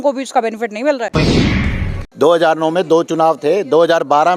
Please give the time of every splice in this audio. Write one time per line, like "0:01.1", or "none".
0:01.6